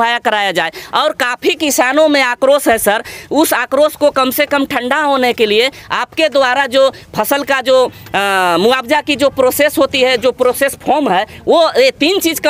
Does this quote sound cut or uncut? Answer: uncut